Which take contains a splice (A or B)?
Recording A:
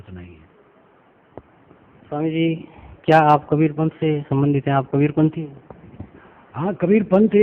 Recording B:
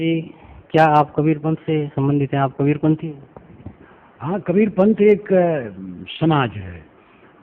A